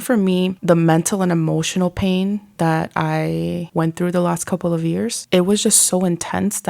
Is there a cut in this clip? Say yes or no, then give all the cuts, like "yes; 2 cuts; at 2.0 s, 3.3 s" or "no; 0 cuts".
yes; 3 cuts; at 2.5 s, 3.6 s, 5.2 s